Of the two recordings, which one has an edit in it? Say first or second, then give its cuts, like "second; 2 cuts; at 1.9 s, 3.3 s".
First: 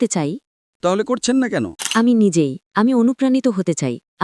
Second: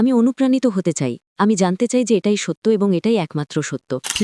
first; 1 cut; at 1.8 s